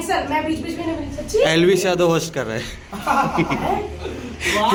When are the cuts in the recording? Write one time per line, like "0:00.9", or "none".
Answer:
none